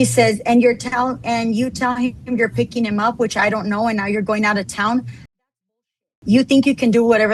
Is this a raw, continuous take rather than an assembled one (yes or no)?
yes